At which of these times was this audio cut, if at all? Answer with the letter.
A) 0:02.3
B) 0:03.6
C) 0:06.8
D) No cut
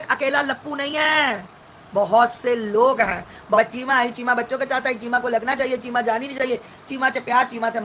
B